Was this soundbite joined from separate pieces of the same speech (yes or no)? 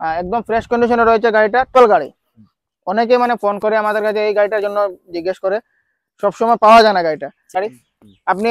yes